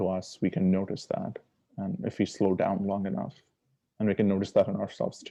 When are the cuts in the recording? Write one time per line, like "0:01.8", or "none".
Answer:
none